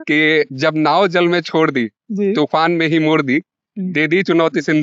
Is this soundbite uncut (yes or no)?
yes